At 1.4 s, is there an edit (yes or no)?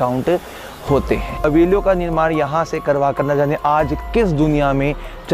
yes